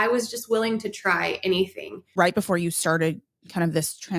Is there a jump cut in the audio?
yes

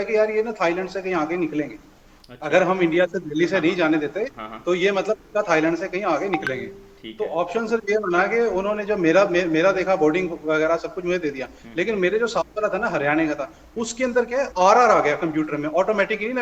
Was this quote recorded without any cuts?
yes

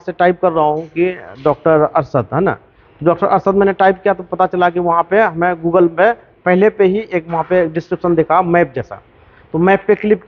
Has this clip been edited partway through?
no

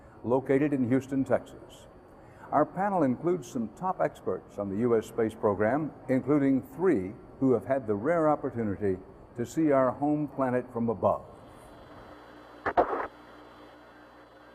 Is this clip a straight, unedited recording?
no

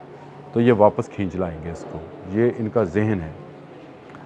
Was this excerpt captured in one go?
yes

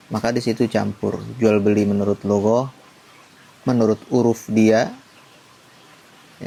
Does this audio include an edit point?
no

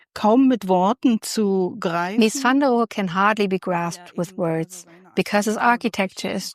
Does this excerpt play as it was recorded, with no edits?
no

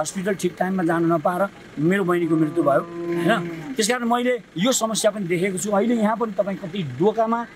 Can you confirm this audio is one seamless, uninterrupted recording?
yes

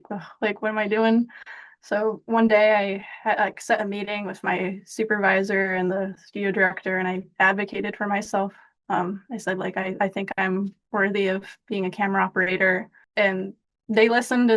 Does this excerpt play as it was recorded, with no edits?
no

